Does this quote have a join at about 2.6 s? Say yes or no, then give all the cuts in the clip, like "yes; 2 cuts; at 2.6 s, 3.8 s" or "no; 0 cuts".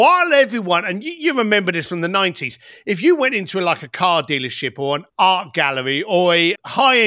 no; 1 cut; at 5.0 s